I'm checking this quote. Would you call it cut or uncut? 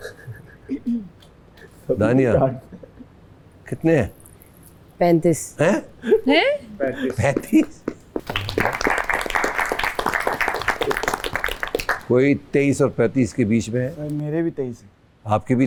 uncut